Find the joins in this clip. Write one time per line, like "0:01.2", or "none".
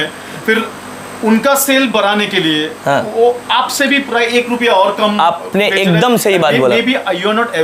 none